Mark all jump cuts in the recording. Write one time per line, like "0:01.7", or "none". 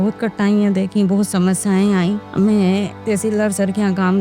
none